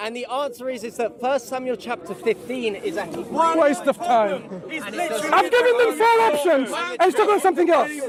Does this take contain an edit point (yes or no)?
no